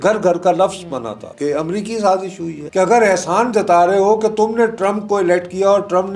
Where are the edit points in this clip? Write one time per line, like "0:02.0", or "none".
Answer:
0:01.3
0:02.6